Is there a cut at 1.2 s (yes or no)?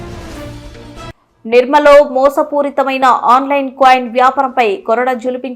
yes